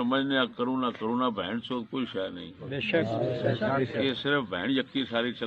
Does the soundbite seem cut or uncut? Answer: uncut